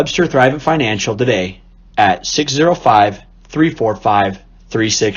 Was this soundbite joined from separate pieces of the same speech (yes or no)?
no